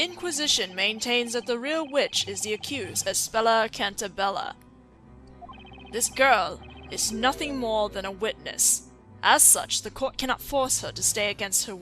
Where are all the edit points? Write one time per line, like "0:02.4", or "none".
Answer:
0:01.2

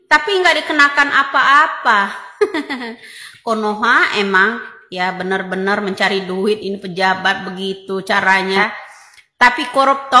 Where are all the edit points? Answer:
0:08.6

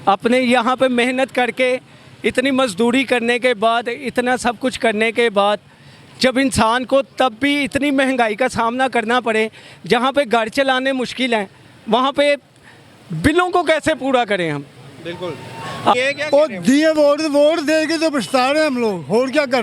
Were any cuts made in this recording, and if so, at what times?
0:16.0

